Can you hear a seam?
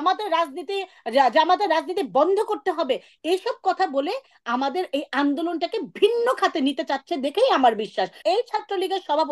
yes; 1 cut; at 8.1 s

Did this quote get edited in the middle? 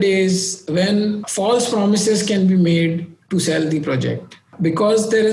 yes; 2 cuts; at 1.3 s, 4.5 s

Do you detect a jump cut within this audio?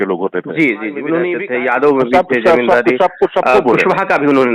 yes; 1 cut; at 1.4 s

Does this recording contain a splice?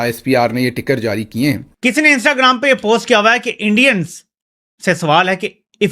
yes; 1 cut; at 1.7 s

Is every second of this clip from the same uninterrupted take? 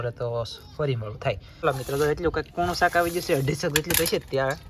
no; 1 cut; at 1.6 s

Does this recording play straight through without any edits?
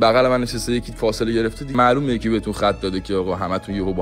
no; 1 cut; at 1.7 s

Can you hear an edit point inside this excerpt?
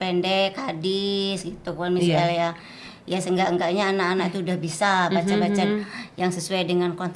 no; 0 cuts

